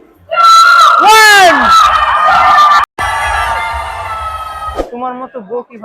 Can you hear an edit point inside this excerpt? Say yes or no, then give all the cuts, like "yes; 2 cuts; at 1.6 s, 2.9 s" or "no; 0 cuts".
yes; 1 cut; at 4.8 s